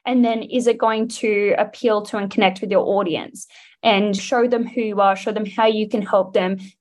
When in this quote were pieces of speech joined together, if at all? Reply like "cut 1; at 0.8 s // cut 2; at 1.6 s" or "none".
cut 1; at 4.2 s